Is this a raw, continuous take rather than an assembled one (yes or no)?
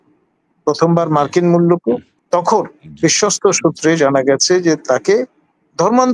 no